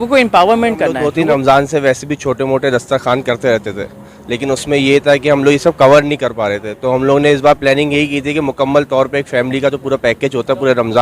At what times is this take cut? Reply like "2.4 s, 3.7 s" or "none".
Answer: 1.0 s